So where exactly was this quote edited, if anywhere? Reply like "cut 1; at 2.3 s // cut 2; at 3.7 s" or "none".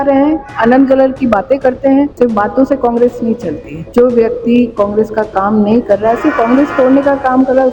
cut 1; at 2.1 s // cut 2; at 3.7 s